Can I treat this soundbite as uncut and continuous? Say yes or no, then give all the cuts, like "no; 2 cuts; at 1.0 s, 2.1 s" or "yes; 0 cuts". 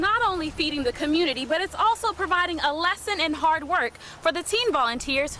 yes; 0 cuts